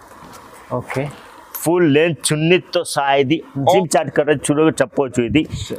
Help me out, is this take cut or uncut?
cut